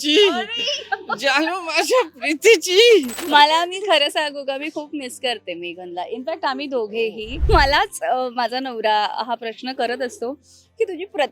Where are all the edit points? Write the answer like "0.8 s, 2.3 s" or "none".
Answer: 3.2 s, 7.3 s